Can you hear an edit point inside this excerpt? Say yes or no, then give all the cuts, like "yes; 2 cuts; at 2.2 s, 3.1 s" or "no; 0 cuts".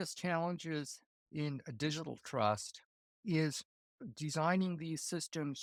no; 0 cuts